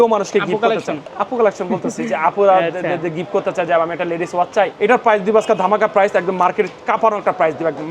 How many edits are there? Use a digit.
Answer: 2